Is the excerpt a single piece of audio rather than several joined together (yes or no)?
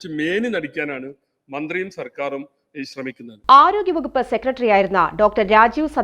yes